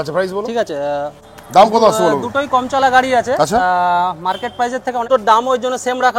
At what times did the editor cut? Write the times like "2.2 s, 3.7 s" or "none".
1.4 s, 5.1 s